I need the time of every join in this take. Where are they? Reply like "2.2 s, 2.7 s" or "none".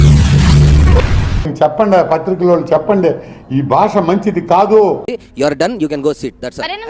1.5 s, 5.0 s